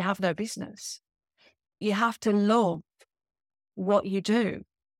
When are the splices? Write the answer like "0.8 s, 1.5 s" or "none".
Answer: 1.8 s